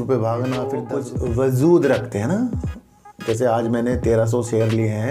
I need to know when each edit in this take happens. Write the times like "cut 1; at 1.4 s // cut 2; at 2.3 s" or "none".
cut 1; at 0.9 s